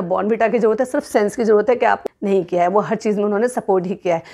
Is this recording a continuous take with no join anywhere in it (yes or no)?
no